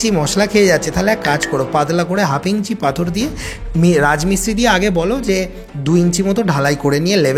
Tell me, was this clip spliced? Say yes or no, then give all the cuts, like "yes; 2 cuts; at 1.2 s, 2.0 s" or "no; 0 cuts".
no; 0 cuts